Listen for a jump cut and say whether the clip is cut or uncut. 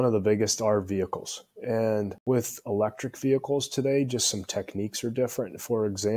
cut